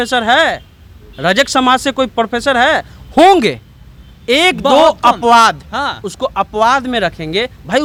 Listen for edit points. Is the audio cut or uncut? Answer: uncut